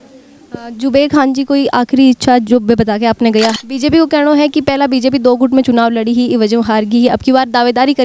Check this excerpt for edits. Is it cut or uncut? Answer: cut